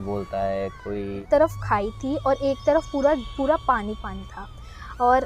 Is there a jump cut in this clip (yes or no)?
yes